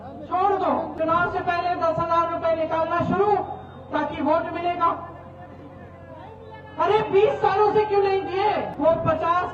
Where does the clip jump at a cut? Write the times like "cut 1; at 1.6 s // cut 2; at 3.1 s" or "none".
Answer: cut 1; at 0.9 s // cut 2; at 8.7 s